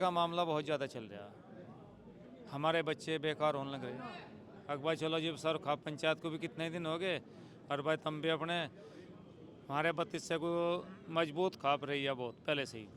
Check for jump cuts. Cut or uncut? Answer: cut